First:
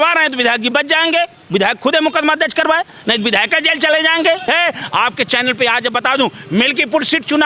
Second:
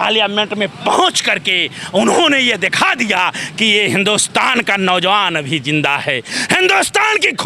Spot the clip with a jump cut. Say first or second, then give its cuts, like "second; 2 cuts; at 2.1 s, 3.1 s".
first; 1 cut; at 4.5 s